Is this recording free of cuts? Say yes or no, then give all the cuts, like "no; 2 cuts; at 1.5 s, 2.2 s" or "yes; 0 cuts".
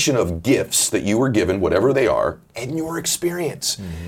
no; 1 cut; at 2.5 s